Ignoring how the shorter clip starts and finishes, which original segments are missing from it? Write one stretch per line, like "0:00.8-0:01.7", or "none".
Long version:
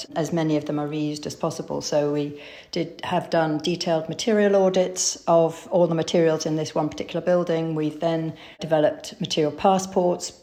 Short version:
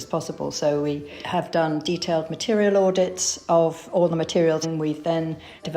0:02.5-0:03.0
0:06.4-0:07.6